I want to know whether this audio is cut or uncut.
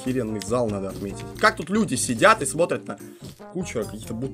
cut